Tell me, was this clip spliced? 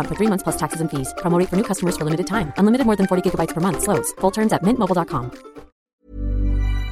yes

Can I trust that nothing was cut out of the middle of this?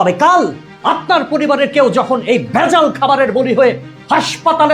yes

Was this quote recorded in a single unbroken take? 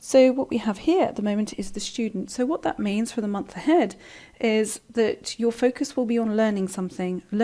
yes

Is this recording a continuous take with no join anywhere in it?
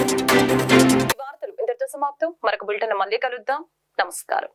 yes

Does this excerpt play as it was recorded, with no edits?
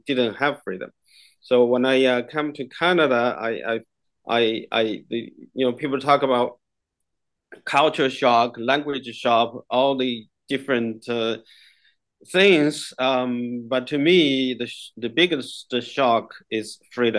yes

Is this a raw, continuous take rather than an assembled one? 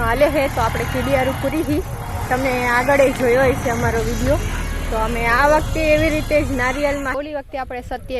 no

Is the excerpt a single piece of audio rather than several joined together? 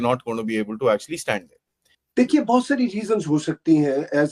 yes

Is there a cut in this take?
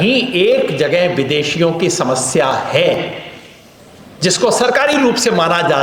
no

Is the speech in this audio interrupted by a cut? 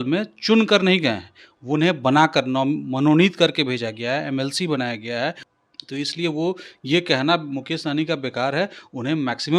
yes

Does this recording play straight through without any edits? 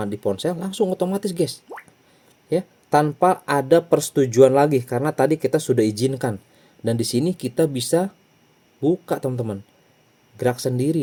yes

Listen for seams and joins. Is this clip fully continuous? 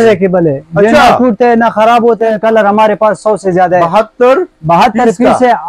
no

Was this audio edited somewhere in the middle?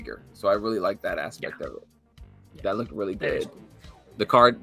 no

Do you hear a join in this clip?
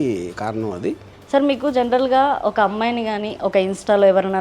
yes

